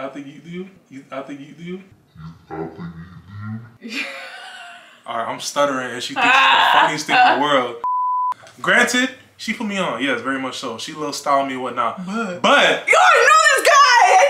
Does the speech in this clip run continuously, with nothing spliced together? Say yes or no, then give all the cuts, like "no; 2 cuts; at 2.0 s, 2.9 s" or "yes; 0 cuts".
no; 2 cuts; at 3.7 s, 8.3 s